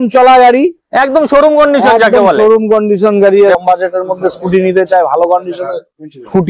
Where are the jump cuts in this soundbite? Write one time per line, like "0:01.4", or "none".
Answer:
0:03.6